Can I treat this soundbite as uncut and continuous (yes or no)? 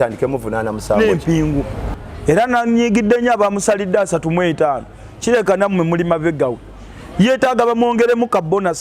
no